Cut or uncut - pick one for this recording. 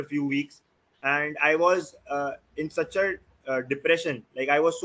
uncut